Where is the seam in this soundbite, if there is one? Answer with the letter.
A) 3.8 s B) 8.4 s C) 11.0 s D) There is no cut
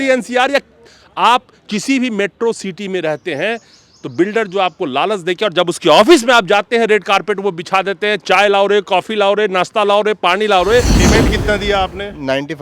C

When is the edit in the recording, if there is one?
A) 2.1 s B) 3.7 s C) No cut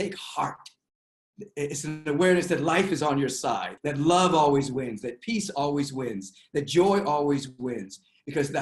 B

